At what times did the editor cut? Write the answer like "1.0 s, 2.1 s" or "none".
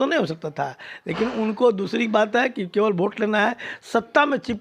none